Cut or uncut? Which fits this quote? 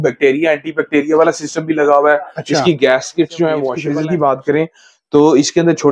cut